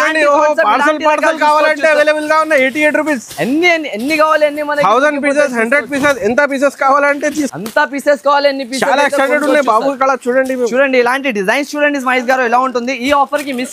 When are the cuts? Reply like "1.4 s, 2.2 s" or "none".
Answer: none